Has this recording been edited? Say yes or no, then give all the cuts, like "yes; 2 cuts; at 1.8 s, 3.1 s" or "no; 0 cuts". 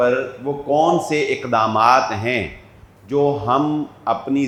no; 0 cuts